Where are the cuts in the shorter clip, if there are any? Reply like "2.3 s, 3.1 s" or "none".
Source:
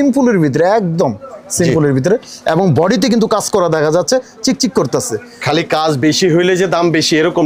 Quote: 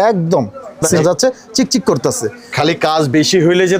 1.0 s